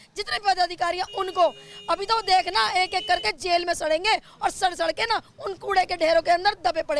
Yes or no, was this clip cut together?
no